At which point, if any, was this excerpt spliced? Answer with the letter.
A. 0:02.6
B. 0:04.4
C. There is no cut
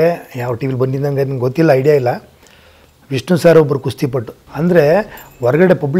B